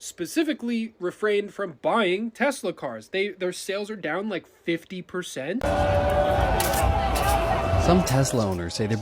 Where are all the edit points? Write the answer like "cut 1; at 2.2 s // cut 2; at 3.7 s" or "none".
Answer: cut 1; at 5.6 s